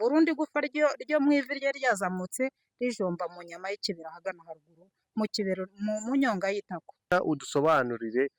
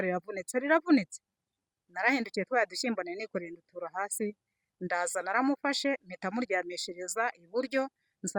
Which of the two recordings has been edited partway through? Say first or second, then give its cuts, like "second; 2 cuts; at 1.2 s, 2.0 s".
first; 1 cut; at 7.1 s